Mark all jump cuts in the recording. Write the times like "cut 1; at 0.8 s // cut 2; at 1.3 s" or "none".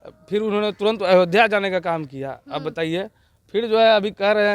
none